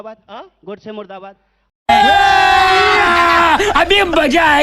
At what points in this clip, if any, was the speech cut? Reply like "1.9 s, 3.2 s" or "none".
1.8 s

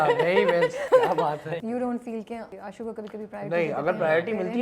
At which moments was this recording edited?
0.8 s, 1.5 s, 2.5 s

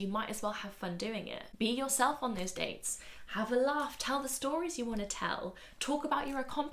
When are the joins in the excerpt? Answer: 1.4 s

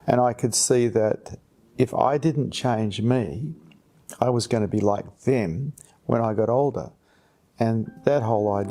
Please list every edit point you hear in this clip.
none

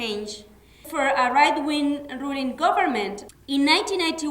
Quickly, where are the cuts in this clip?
0.9 s, 3.2 s

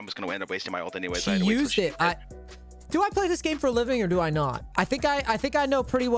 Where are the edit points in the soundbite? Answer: 4.6 s

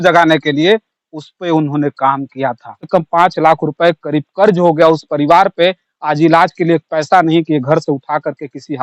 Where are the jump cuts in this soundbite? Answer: 2.9 s

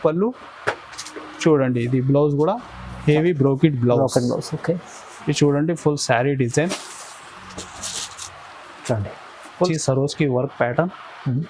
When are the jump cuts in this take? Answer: 9.7 s

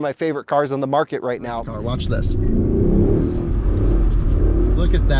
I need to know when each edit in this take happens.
1.6 s

